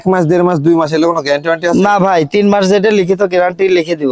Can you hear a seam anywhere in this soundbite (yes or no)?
no